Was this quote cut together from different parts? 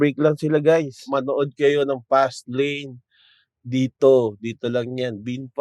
yes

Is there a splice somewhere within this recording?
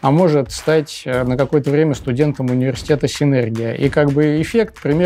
no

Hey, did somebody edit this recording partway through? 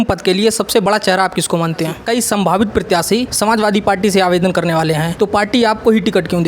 yes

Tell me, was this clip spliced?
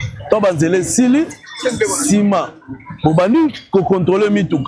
no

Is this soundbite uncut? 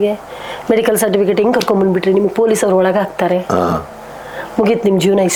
yes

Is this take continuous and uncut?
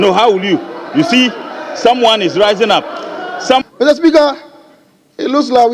no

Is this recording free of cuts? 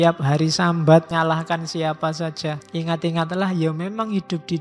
no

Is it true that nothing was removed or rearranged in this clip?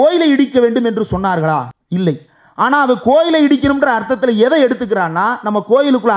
no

